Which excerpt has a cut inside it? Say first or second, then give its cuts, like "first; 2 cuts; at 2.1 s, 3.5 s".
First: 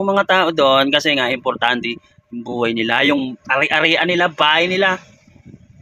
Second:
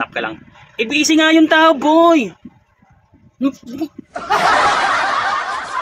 second; 1 cut; at 4.1 s